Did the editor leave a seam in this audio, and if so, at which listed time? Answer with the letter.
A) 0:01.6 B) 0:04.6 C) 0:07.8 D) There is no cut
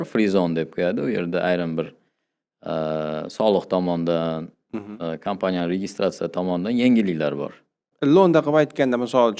C